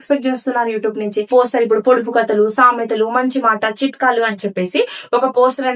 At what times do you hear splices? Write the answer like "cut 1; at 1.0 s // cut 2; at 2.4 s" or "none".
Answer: cut 1; at 1.3 s